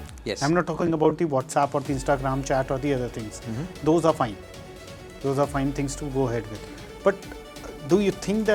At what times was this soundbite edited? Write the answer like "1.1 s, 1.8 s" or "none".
none